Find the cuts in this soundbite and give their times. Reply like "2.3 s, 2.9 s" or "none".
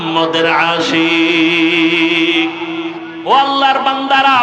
3.1 s